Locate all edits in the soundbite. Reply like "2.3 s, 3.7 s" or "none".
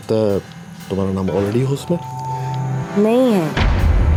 none